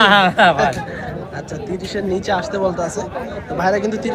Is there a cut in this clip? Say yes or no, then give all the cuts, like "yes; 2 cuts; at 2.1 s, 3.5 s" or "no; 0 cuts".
no; 0 cuts